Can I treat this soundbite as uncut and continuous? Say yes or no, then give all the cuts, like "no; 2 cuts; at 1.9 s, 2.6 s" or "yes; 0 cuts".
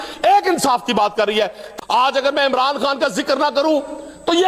no; 1 cut; at 1.6 s